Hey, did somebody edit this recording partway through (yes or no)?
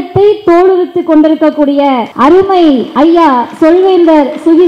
yes